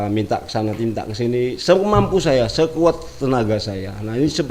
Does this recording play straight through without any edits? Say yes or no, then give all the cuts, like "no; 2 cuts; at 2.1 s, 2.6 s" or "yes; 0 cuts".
yes; 0 cuts